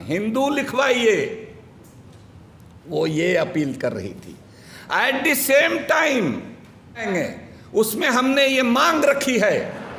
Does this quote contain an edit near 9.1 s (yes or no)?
no